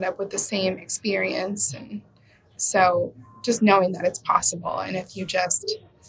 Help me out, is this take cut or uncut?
uncut